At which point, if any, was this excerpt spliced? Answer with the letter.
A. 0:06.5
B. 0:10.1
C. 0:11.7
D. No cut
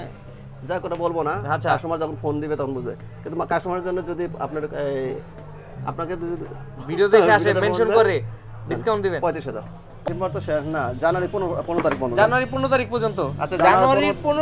B